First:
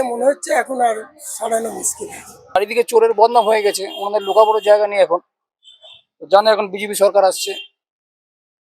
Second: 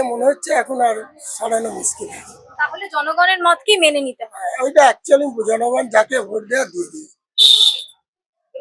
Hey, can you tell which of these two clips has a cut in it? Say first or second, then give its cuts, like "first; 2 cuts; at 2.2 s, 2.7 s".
first; 1 cut; at 2.6 s